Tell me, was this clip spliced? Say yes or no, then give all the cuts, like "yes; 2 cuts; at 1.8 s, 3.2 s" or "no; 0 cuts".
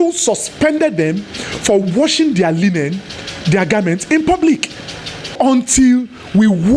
yes; 1 cut; at 5.3 s